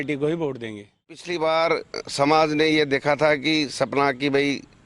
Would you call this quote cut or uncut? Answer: cut